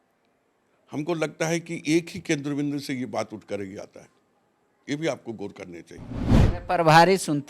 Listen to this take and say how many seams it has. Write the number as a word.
one